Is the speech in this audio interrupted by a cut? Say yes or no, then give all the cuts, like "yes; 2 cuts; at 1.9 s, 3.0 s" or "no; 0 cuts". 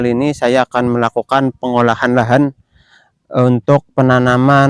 no; 0 cuts